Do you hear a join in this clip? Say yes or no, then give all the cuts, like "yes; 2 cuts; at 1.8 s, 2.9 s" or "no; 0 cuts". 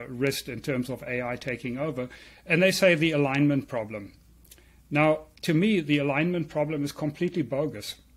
no; 0 cuts